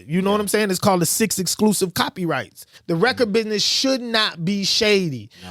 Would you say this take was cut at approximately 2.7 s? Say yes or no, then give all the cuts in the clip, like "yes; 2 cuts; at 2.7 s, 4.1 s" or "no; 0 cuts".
yes; 1 cut; at 2.7 s